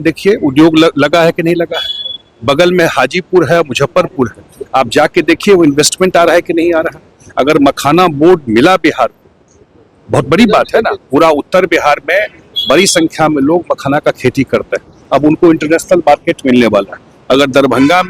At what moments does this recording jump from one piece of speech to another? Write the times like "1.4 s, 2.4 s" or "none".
none